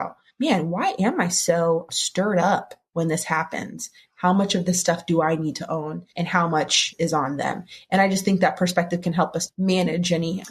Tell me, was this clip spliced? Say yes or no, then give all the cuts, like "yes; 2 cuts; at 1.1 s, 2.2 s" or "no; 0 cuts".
yes; 1 cut; at 9.4 s